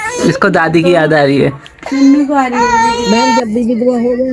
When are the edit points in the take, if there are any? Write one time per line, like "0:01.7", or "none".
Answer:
0:03.0